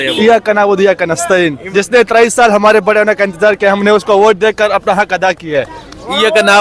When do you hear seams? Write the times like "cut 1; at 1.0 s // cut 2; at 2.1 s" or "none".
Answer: none